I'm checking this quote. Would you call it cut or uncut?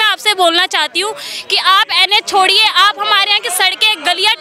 uncut